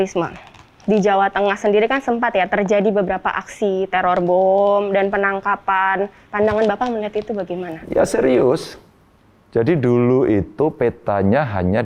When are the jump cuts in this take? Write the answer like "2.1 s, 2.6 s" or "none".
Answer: 6.2 s